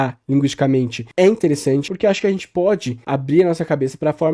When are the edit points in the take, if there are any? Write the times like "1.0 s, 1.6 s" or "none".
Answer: 1.0 s, 1.9 s, 2.9 s